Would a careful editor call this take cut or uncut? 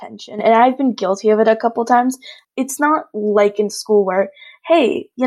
cut